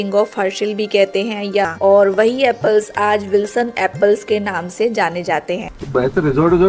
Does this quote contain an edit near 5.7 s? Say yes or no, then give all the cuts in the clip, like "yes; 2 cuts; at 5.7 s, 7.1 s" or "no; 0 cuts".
yes; 2 cuts; at 1.7 s, 5.7 s